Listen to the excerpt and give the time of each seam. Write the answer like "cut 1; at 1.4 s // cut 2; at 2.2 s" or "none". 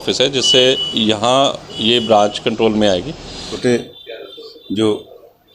cut 1; at 3.5 s